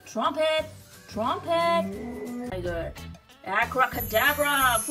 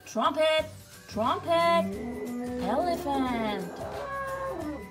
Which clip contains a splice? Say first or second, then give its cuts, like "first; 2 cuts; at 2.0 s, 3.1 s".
first; 1 cut; at 2.5 s